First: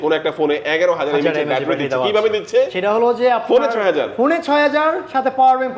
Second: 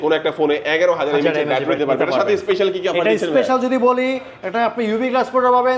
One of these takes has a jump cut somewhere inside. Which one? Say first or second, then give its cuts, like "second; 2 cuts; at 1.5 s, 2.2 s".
second; 1 cut; at 1.8 s